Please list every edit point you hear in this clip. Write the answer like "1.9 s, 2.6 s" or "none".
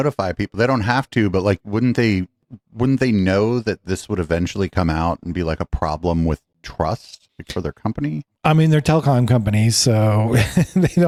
none